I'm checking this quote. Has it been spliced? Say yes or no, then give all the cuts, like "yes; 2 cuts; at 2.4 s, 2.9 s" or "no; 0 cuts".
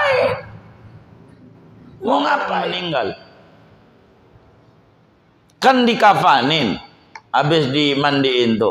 yes; 1 cut; at 2.7 s